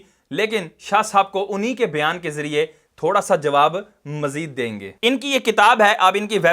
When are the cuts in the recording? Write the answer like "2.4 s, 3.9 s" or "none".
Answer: 4.9 s